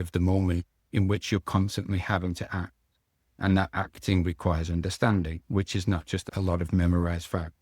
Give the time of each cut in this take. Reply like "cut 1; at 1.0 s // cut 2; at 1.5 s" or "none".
cut 1; at 6.2 s